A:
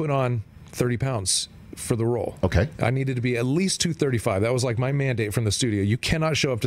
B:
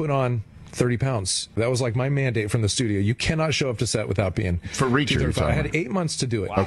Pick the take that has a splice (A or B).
B